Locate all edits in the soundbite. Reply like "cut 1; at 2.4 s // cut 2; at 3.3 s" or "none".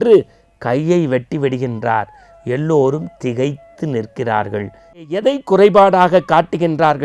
cut 1; at 5.1 s